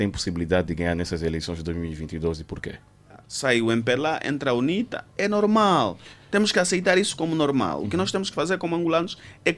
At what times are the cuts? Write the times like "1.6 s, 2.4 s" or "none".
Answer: 3.3 s